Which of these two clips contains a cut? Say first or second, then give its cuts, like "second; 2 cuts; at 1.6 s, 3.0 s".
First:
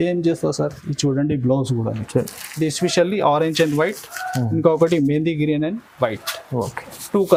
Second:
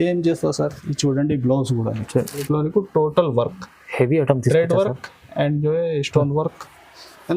second; 1 cut; at 2.4 s